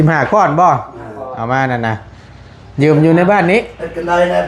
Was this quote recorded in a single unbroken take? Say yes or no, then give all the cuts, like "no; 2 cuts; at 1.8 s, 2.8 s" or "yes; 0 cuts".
yes; 0 cuts